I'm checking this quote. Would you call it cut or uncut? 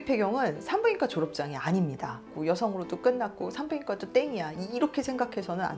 cut